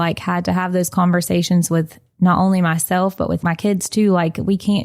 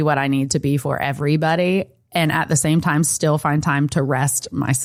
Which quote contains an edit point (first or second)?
first